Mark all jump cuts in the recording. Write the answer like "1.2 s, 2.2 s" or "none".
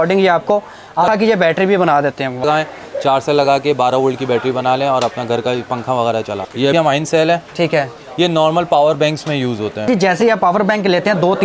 1.1 s, 2.4 s, 6.7 s, 9.9 s